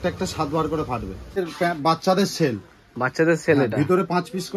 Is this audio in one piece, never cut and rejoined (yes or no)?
no